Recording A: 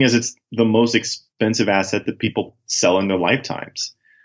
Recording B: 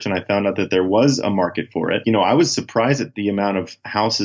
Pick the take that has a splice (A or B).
B